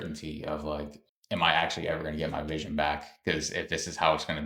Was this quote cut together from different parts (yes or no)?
no